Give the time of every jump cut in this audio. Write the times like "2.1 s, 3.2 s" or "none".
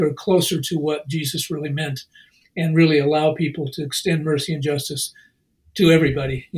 none